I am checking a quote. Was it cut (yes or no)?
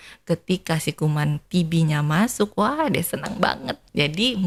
no